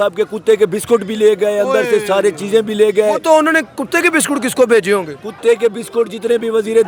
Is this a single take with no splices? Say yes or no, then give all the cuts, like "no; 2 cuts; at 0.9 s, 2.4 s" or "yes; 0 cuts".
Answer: yes; 0 cuts